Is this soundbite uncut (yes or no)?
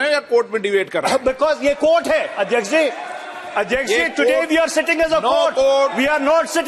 yes